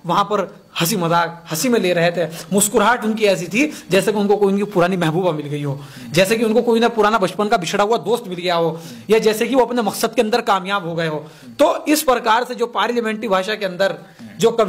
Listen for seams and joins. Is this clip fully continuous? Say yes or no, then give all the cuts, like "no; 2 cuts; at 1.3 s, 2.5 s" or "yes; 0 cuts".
yes; 0 cuts